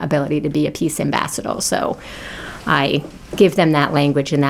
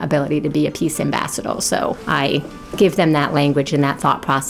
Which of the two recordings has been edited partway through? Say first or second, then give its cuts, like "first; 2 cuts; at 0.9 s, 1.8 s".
second; 1 cut; at 2.0 s